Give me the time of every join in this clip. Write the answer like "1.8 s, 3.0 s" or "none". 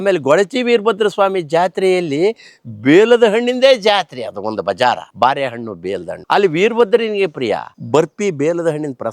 6.1 s, 7.7 s